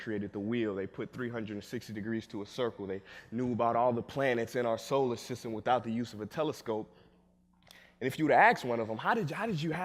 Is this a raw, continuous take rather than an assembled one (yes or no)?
yes